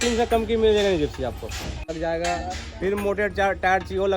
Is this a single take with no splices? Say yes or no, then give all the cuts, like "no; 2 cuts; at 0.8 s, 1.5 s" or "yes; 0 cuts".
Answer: no; 1 cut; at 1.8 s